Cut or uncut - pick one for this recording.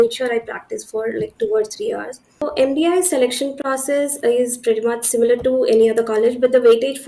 cut